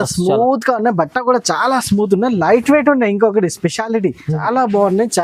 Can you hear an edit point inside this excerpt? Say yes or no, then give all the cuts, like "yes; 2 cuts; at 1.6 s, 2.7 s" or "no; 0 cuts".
yes; 1 cut; at 4.3 s